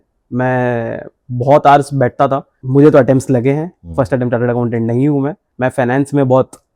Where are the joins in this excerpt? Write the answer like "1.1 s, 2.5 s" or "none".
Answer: 2.5 s, 5.4 s